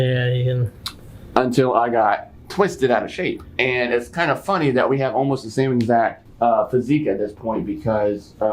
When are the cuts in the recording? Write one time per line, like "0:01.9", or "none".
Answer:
0:06.2